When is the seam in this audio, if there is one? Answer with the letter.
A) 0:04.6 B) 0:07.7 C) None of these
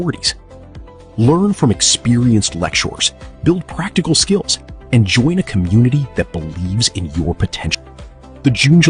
B